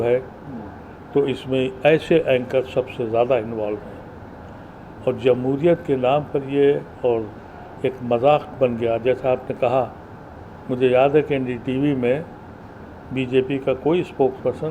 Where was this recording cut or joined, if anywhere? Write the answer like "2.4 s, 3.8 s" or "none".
none